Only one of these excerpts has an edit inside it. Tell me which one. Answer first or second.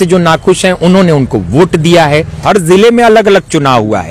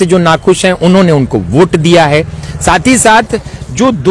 first